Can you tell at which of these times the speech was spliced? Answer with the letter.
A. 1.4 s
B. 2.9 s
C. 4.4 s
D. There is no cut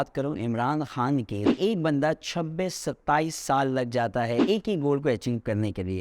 A